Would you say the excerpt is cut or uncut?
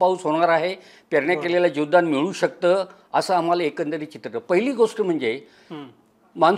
uncut